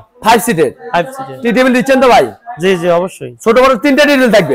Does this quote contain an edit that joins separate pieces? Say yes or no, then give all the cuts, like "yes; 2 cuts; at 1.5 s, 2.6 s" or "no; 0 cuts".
no; 0 cuts